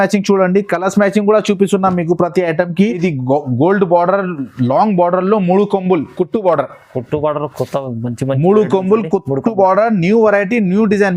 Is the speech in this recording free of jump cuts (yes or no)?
no